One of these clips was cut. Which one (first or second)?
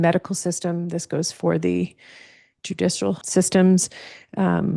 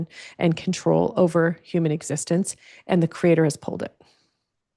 first